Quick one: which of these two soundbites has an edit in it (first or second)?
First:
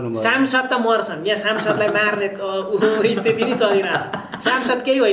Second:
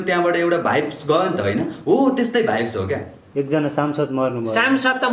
second